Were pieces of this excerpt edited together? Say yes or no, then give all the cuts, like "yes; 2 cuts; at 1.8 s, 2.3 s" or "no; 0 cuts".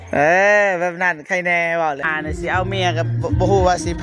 yes; 1 cut; at 2.1 s